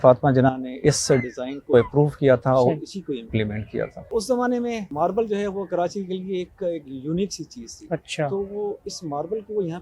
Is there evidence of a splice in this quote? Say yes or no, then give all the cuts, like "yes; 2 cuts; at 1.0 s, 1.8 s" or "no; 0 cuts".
no; 0 cuts